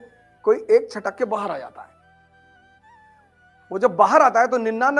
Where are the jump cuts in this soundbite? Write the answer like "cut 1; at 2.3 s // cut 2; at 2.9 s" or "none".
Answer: none